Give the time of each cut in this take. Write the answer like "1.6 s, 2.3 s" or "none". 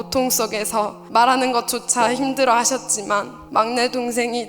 1.0 s, 3.4 s